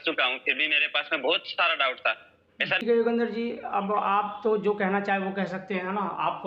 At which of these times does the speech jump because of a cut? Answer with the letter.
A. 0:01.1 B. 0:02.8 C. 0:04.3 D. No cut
B